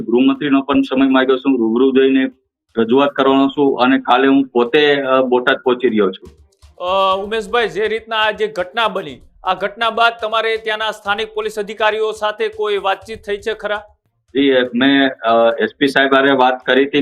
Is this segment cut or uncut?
uncut